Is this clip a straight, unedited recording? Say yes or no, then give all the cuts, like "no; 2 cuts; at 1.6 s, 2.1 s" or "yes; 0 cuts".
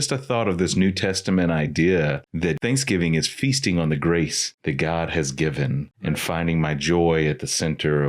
no; 3 cuts; at 2.5 s, 4.5 s, 5.9 s